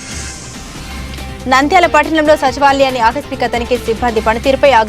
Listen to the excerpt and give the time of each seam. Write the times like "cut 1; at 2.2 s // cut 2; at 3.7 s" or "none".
cut 1; at 1.1 s